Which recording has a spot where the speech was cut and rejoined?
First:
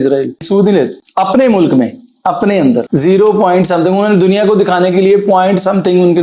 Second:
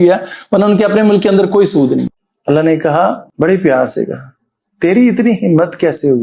second; 1 cut; at 2.1 s

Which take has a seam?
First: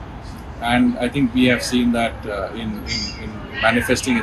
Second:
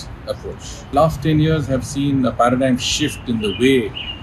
second; 1 cut; at 0.9 s

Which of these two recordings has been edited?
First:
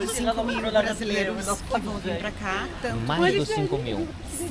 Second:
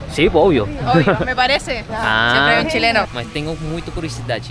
second; 2 cuts; at 1.9 s, 3.1 s

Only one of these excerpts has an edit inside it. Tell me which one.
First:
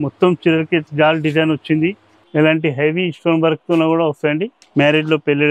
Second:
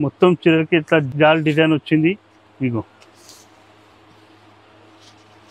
first; 3 cuts; at 0.9 s, 2.1 s, 4.6 s

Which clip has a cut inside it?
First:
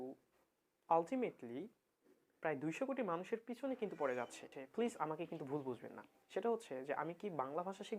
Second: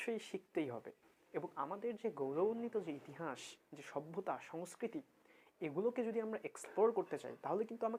first; 1 cut; at 4.6 s

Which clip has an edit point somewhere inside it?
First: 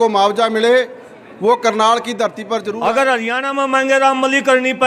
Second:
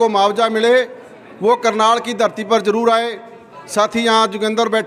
first; 1 cut; at 2.7 s

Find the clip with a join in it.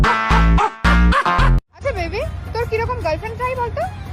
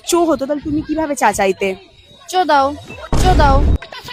first; 1 cut; at 1.7 s

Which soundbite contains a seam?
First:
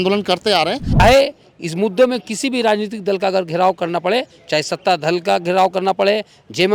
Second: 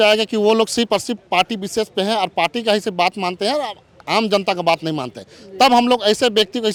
first; 1 cut; at 1.0 s

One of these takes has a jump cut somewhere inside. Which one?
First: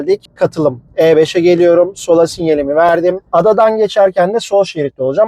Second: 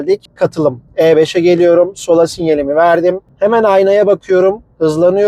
first; 1 cut; at 3.3 s

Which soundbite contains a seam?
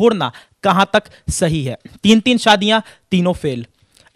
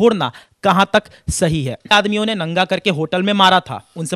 second; 1 cut; at 1.9 s

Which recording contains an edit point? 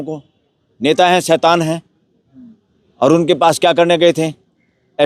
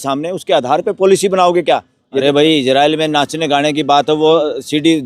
second; 1 cut; at 2.2 s

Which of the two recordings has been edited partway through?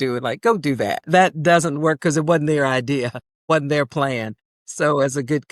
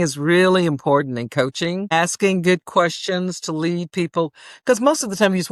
first; 1 cut; at 1.0 s

